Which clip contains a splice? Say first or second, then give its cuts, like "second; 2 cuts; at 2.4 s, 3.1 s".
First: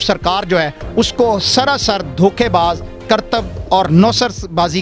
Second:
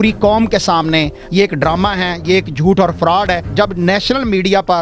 second; 2 cuts; at 1.2 s, 3.5 s